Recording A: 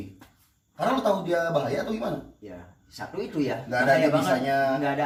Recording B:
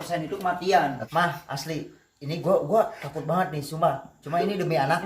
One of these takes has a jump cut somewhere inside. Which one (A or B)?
B